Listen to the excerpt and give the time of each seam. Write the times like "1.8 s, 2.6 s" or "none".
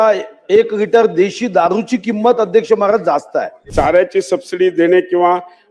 3.6 s